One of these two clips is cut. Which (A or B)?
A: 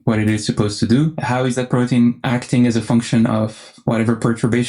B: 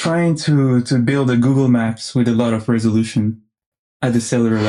A